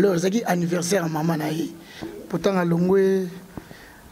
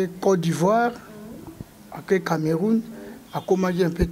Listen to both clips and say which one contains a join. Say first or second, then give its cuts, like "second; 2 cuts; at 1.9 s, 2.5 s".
first; 1 cut; at 2.1 s